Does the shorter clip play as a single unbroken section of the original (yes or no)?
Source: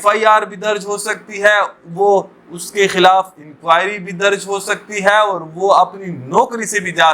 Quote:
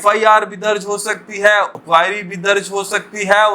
no